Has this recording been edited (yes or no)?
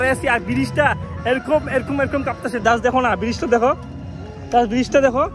no